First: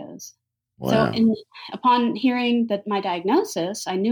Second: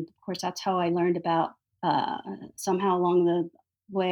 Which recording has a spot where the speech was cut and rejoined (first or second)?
second